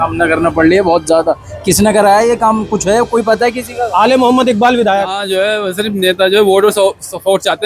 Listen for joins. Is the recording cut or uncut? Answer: cut